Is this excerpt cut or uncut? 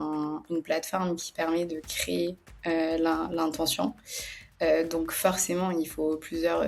uncut